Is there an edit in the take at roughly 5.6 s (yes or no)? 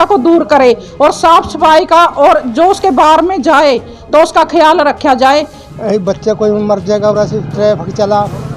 yes